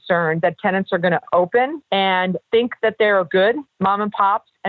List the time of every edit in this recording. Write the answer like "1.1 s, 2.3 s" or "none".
2.2 s, 3.7 s

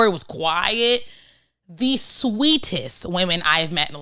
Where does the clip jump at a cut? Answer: none

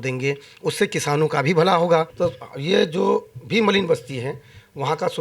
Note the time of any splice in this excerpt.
2.1 s

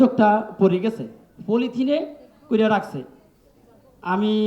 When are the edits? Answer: none

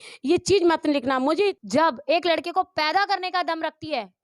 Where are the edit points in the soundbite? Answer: 1.5 s

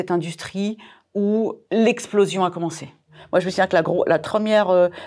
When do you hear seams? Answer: 1.6 s, 3.2 s, 4.2 s

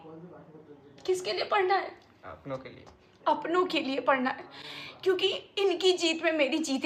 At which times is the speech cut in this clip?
none

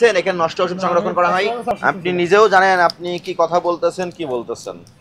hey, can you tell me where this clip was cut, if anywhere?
1.8 s

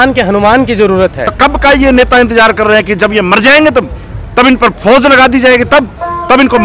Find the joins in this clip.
1.3 s

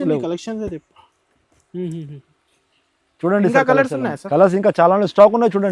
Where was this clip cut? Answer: none

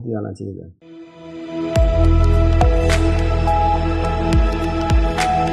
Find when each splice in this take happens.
none

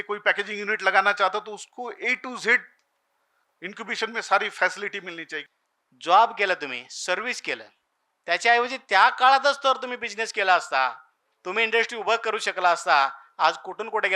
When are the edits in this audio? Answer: 5.4 s

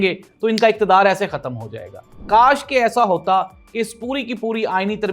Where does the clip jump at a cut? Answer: 2.2 s

